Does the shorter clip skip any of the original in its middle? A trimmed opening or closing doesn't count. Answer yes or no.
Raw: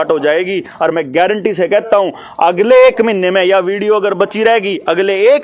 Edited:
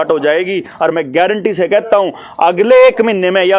no